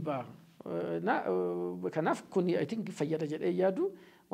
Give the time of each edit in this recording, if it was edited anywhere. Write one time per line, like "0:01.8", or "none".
none